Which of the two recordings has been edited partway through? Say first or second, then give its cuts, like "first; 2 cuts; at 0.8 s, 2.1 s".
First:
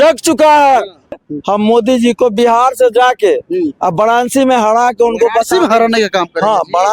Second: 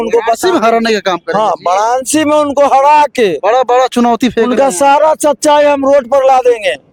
first; 1 cut; at 1.2 s